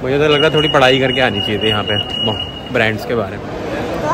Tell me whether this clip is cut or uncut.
uncut